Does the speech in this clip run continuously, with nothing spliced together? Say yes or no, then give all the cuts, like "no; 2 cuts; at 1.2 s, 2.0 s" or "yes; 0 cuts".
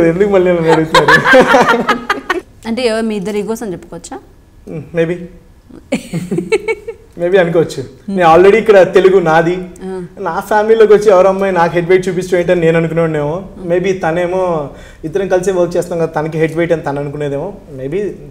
no; 1 cut; at 2.5 s